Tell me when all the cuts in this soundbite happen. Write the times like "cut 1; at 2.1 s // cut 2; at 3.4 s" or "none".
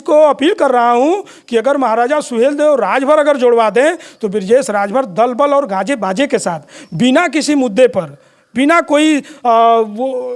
none